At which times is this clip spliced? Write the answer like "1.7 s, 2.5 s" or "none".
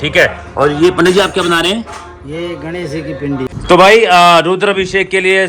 3.5 s